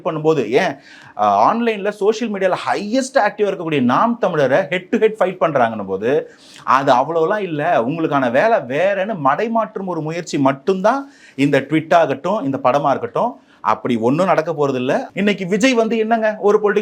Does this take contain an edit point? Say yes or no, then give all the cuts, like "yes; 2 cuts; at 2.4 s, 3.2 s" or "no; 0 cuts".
yes; 1 cut; at 15.1 s